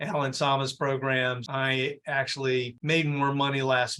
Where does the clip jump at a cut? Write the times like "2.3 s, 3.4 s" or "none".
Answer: 1.4 s